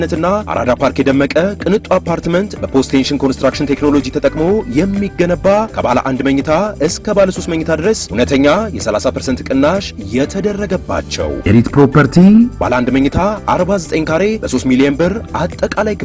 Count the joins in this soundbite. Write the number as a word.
zero